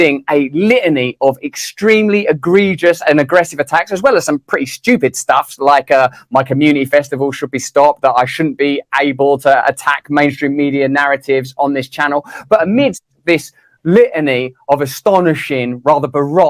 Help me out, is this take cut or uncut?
uncut